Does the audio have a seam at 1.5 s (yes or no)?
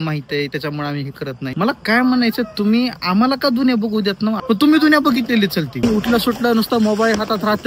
yes